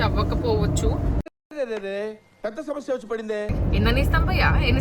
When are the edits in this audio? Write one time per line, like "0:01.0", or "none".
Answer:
0:03.5